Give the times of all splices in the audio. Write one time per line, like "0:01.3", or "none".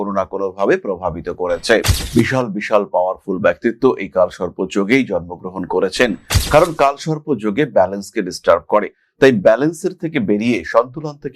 0:01.9